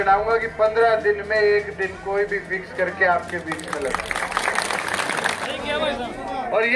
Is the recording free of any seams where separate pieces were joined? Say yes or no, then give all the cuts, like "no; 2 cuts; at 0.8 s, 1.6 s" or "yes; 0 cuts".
no; 1 cut; at 5.4 s